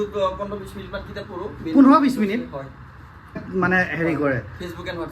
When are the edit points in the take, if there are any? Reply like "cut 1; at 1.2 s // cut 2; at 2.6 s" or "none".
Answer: cut 1; at 3.4 s